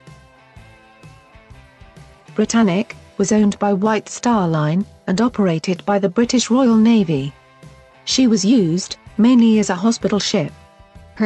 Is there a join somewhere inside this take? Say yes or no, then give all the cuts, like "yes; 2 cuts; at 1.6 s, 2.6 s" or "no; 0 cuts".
no; 0 cuts